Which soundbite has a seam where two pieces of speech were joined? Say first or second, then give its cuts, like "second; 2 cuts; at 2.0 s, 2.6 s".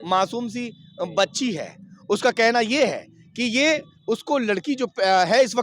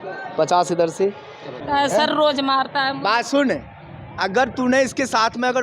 second; 1 cut; at 1.6 s